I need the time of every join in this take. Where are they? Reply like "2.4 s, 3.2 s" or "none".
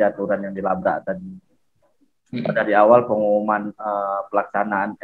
none